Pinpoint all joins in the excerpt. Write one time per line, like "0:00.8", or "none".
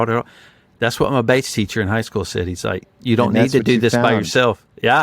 0:02.8

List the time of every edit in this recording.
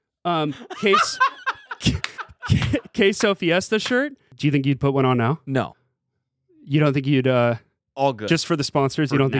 0:04.3

